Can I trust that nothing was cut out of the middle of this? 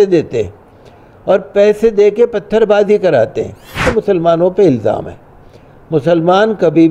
no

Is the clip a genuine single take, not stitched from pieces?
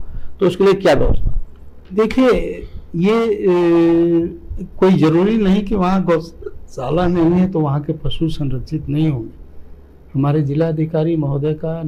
yes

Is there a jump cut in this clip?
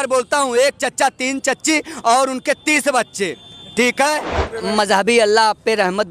yes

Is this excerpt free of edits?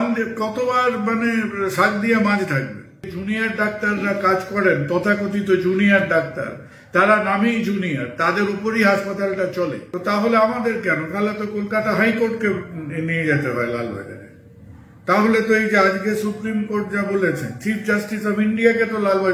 no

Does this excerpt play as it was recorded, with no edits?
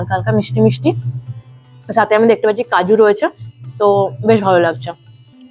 yes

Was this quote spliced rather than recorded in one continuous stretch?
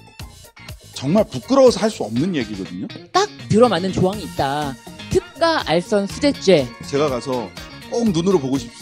yes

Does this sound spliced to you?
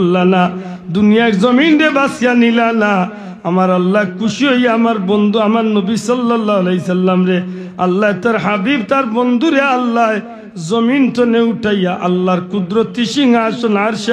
no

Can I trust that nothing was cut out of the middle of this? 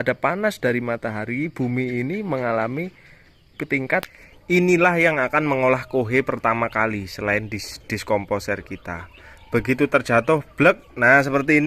no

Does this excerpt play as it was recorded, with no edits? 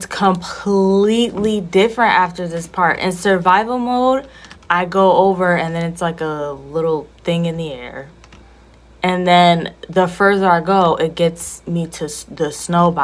yes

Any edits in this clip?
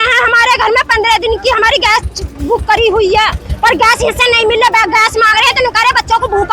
no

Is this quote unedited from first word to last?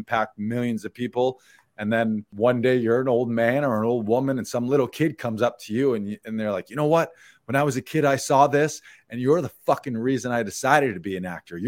no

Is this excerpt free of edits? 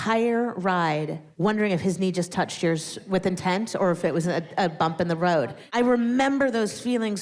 no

